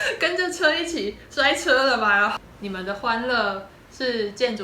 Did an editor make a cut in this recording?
yes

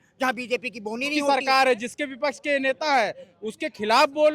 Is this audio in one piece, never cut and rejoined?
no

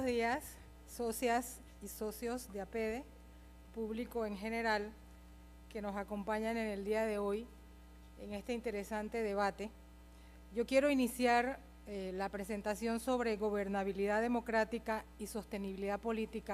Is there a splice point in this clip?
no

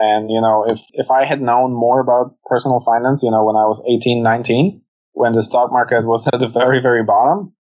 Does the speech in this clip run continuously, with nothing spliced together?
no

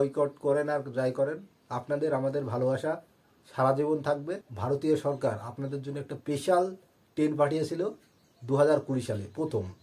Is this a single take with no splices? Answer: no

